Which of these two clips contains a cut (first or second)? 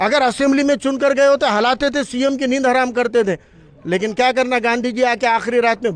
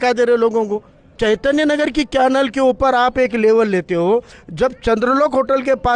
second